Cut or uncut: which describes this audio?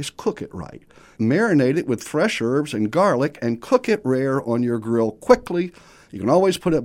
cut